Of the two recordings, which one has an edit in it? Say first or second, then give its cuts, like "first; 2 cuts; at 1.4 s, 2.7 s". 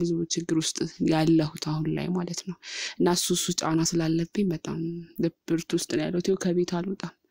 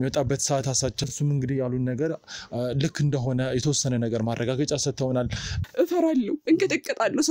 second; 2 cuts; at 1.1 s, 5.6 s